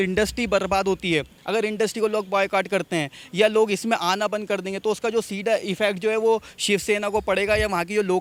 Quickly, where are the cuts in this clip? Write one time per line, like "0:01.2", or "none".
none